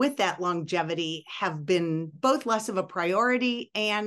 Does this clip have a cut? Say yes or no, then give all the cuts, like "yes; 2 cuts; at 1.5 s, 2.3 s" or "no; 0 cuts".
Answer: yes; 1 cut; at 2.1 s